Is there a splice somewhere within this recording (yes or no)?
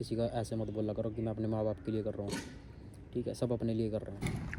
no